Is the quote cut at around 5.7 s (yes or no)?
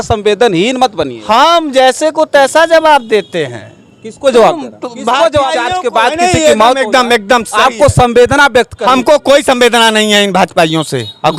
yes